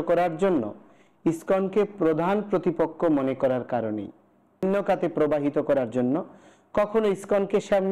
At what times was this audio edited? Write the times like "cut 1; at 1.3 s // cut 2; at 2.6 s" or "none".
cut 1; at 4.6 s